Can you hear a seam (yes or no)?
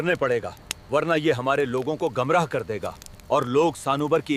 no